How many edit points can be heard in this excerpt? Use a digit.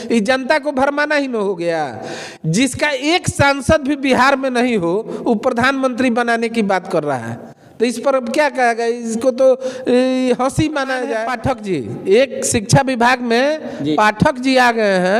1